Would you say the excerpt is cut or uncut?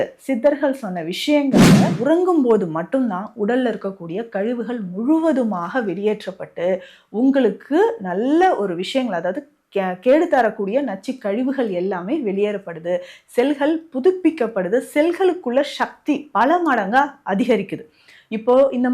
cut